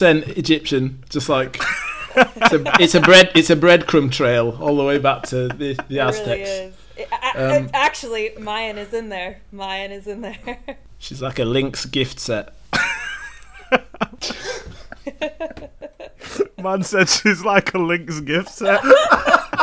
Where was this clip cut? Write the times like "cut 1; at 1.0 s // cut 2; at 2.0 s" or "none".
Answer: cut 1; at 10.9 s // cut 2; at 12.6 s // cut 3; at 14.2 s